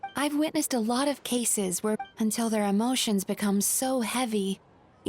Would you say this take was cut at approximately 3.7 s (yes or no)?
no